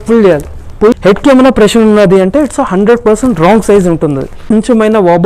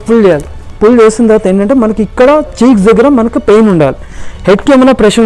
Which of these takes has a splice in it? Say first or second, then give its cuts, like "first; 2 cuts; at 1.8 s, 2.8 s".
first; 2 cuts; at 0.9 s, 4.4 s